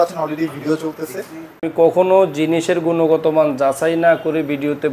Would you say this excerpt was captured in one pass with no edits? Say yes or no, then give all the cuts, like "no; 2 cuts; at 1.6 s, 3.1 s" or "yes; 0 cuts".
no; 1 cut; at 1.7 s